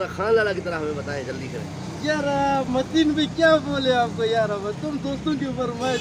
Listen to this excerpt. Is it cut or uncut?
uncut